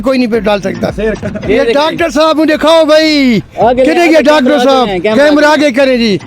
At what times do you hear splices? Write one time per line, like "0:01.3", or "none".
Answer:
0:01.3